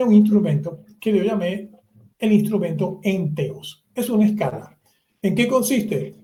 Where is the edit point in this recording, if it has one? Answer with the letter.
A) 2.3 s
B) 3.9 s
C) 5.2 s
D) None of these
D